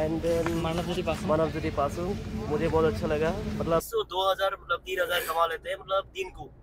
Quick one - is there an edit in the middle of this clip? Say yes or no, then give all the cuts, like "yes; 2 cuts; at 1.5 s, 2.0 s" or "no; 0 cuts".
yes; 1 cut; at 3.9 s